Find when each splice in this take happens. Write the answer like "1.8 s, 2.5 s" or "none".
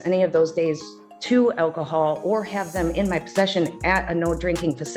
none

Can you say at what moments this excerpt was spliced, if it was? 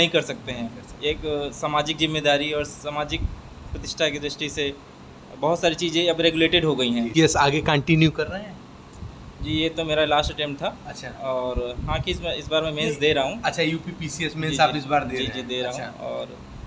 7.1 s

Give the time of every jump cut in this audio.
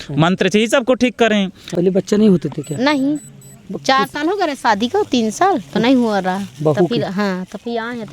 1.6 s

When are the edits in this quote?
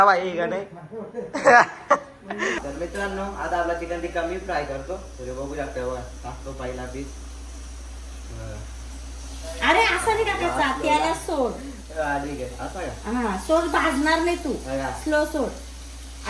2.5 s

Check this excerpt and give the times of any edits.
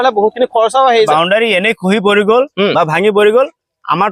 1.1 s

